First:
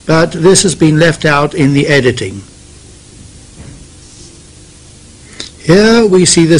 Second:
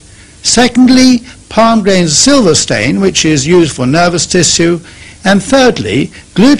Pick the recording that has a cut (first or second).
second